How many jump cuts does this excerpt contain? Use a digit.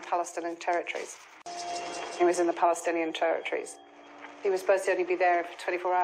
1